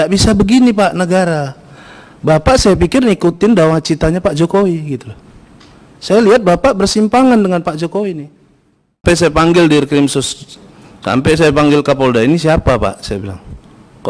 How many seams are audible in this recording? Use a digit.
1